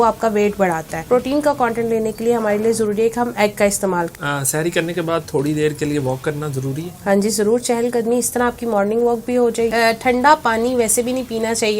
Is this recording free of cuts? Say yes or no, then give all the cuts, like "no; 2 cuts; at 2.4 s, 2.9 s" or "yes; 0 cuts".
no; 3 cuts; at 0.9 s, 4.1 s, 9.7 s